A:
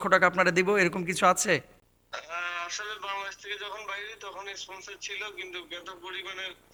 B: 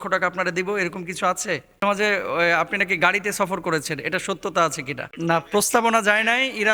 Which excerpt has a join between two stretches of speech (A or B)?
B